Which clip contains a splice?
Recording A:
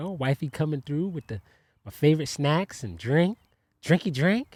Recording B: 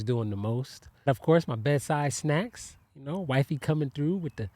B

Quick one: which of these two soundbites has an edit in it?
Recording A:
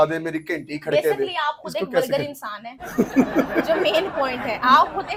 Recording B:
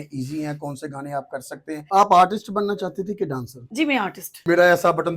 B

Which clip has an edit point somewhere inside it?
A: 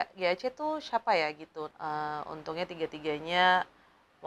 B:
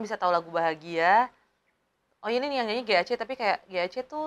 A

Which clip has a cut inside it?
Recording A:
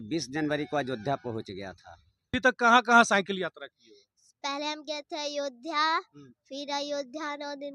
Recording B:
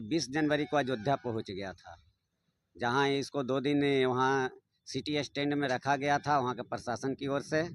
A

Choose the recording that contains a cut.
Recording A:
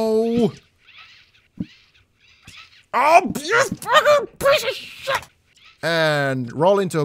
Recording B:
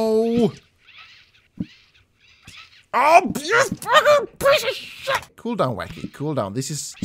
A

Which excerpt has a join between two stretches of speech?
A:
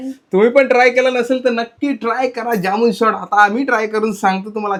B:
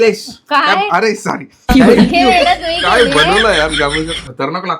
B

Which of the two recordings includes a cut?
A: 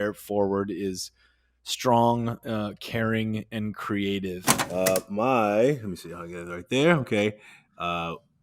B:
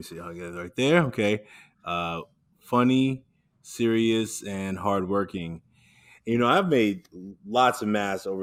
A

